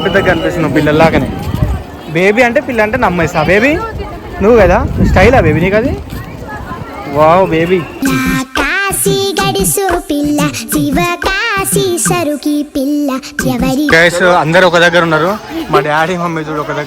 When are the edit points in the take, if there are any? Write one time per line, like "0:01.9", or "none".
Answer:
0:13.9